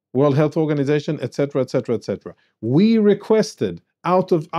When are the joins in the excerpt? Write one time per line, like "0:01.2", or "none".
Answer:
none